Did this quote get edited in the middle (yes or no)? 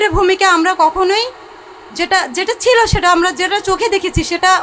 no